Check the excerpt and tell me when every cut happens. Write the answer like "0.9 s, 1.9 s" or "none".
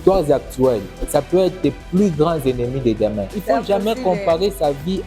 3.3 s

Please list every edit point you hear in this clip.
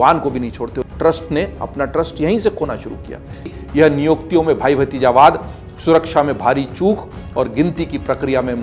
0.9 s, 3.5 s

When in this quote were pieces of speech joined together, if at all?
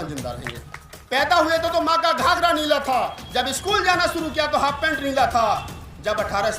0.9 s

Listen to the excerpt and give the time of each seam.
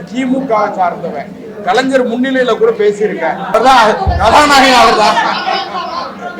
3.5 s

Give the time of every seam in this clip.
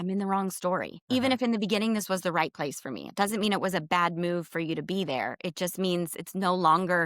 0.9 s

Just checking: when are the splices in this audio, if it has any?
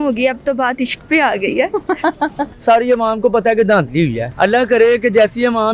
2.5 s, 4.2 s

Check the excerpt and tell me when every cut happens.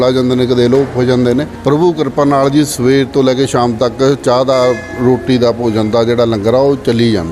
1.5 s

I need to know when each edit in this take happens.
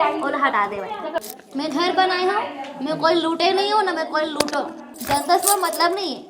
1.1 s, 4.9 s

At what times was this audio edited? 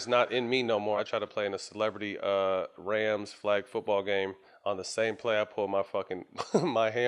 1.0 s, 4.5 s

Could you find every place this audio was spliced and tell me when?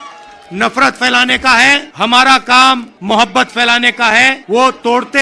1.9 s, 2.9 s, 4.4 s

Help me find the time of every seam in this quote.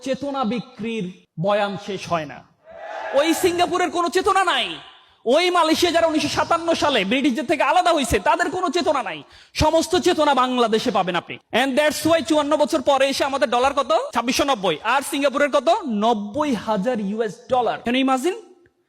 11.3 s, 14.1 s, 17.8 s

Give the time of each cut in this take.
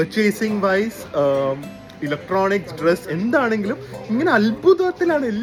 none

